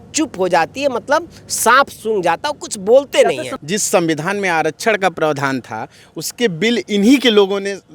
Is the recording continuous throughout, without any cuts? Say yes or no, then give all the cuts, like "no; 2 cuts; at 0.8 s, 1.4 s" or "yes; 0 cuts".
no; 1 cut; at 3.5 s